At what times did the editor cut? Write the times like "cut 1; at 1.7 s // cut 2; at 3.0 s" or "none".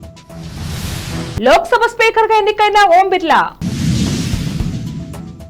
cut 1; at 1.3 s